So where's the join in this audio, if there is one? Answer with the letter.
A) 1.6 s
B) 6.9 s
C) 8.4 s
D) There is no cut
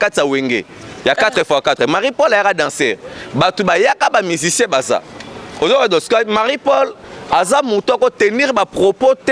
D